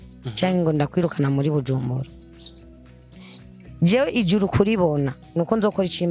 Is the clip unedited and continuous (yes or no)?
yes